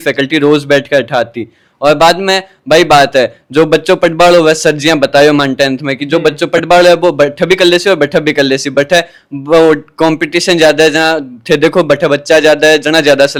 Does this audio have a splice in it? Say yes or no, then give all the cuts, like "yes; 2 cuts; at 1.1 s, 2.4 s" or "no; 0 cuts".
no; 0 cuts